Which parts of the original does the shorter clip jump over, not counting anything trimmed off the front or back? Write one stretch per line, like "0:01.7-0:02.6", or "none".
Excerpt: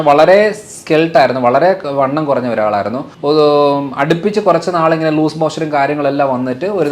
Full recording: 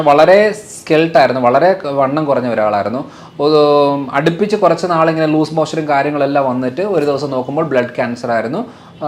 0:03.1-0:03.2